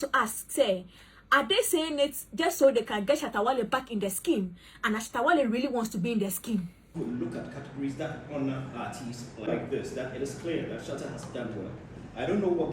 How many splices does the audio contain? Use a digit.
2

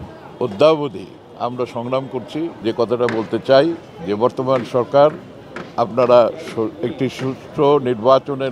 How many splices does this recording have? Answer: 1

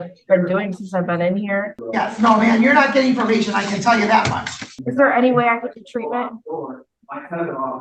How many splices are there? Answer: 2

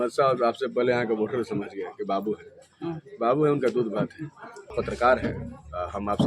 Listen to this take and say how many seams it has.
1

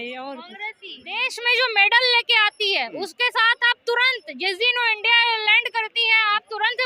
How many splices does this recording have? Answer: 1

